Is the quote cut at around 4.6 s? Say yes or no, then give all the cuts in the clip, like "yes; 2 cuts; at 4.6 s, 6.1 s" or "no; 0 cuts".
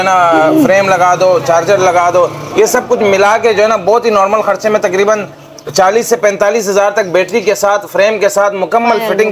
no; 0 cuts